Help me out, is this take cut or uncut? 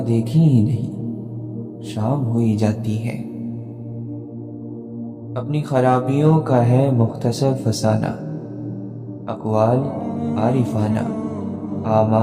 cut